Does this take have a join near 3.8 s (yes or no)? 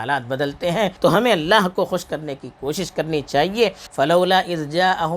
yes